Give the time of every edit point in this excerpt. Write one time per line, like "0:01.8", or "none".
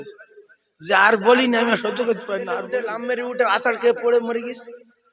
0:02.6